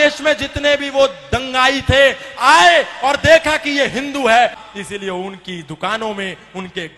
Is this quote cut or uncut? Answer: cut